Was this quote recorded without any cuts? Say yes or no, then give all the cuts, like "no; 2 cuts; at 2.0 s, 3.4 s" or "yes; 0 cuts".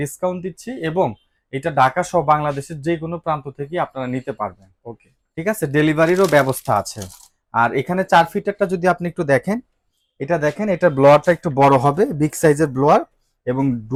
yes; 0 cuts